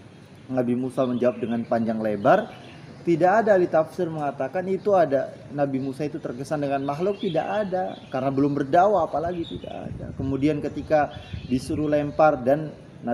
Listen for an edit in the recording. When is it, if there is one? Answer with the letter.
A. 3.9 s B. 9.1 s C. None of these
C